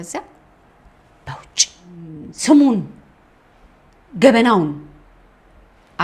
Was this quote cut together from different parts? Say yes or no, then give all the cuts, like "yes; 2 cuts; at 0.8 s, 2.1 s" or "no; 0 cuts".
yes; 1 cut; at 2.2 s